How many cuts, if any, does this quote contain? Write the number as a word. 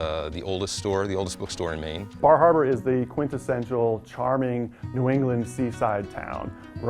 one